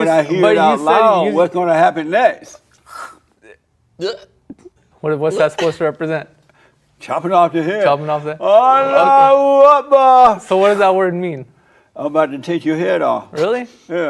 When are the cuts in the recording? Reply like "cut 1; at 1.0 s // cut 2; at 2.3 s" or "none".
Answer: none